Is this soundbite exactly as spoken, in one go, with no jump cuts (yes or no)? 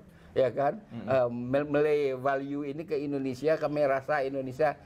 yes